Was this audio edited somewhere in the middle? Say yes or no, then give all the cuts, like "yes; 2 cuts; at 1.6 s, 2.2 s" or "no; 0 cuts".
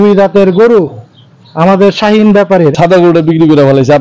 yes; 1 cut; at 2.7 s